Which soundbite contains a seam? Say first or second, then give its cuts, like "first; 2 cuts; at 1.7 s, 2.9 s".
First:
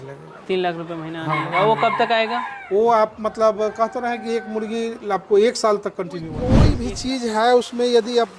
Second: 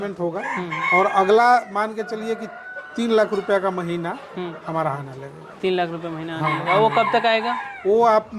first; 1 cut; at 6.7 s